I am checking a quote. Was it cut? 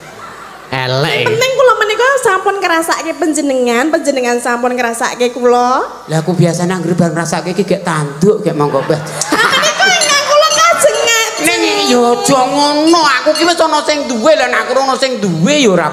no; 0 cuts

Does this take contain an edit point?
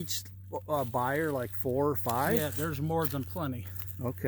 no; 0 cuts

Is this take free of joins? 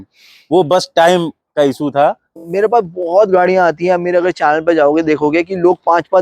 no; 1 cut; at 2.3 s

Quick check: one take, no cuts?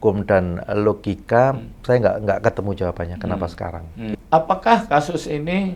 no; 1 cut; at 4.2 s

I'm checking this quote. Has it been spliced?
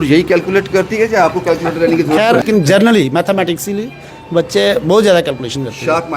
yes; 1 cut; at 2.4 s

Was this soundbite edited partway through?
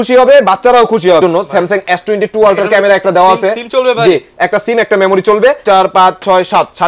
yes; 2 cuts; at 1.2 s, 5.6 s

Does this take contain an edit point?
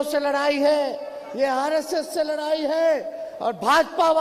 no; 0 cuts

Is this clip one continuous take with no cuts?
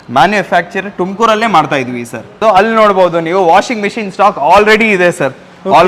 no; 1 cut; at 2.4 s

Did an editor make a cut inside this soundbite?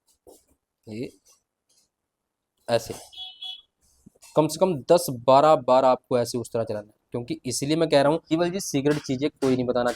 yes; 1 cut; at 8.2 s

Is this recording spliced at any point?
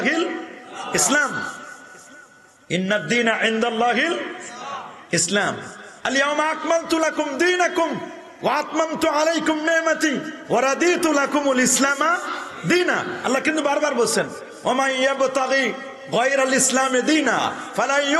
no; 0 cuts

